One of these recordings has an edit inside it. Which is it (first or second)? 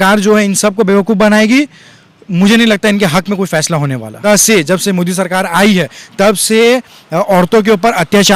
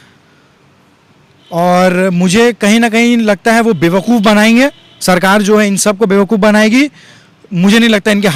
first